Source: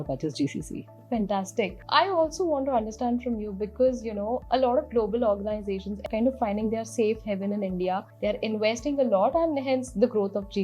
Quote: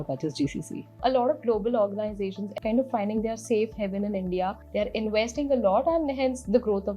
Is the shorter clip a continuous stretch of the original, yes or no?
no